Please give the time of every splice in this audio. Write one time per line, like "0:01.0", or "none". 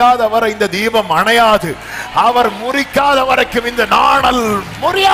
none